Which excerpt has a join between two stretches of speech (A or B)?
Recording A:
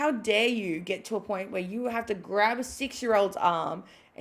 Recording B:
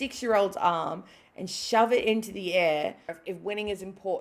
B